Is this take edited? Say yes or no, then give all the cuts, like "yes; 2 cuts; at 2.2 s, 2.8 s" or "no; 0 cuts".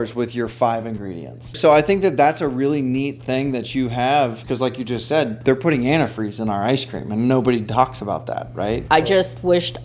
yes; 4 cuts; at 1.5 s, 4.4 s, 5.4 s, 8.8 s